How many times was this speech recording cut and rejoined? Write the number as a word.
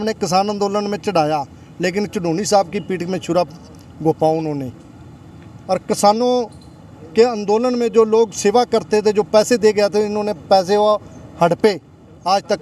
zero